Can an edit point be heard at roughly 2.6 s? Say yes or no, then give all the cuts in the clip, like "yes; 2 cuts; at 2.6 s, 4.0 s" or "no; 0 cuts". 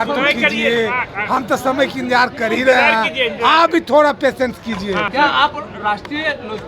no; 1 cut; at 5.1 s